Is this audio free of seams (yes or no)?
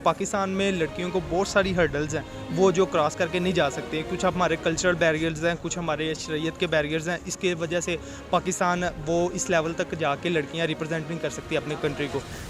yes